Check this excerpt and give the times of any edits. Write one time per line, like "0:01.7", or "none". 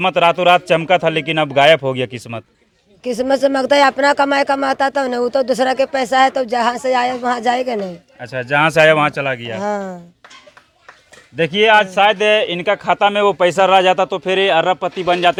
none